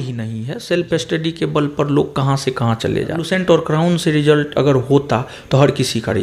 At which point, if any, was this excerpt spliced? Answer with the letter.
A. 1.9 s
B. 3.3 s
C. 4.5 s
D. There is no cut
B